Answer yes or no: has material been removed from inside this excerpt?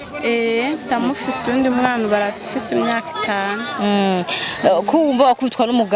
no